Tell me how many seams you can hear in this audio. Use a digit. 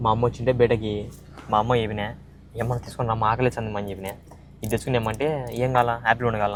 0